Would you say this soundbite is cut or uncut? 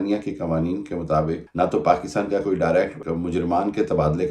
cut